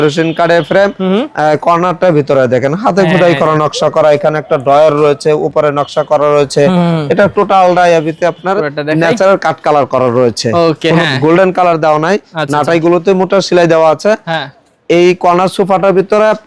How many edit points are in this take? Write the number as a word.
zero